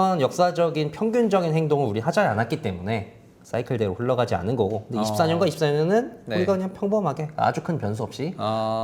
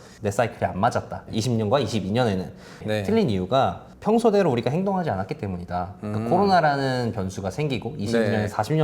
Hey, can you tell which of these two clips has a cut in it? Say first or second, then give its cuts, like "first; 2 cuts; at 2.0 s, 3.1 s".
second; 1 cut; at 2.8 s